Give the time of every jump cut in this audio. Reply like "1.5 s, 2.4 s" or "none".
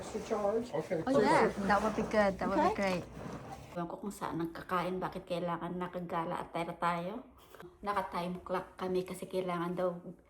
3.7 s, 7.6 s